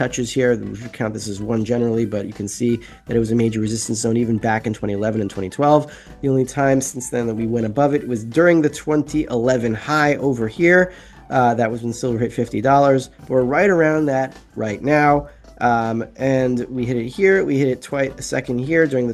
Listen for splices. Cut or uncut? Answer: uncut